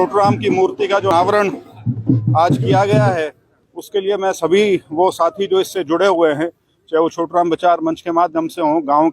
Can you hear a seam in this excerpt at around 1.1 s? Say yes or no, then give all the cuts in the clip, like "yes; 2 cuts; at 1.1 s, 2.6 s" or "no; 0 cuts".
yes; 1 cut; at 1.1 s